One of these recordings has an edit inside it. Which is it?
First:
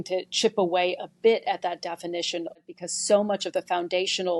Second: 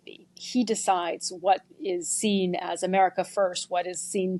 first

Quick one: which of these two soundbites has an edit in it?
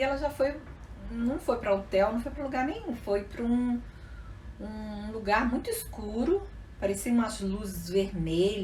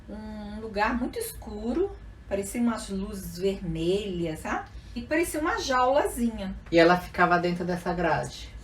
second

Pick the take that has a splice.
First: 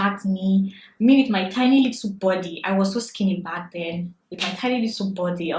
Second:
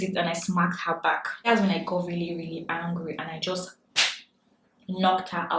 second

